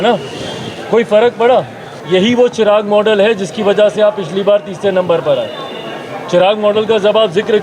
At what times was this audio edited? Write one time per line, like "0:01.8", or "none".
0:02.0